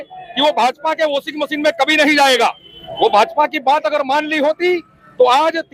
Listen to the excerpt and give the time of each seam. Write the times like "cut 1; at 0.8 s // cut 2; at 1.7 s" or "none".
none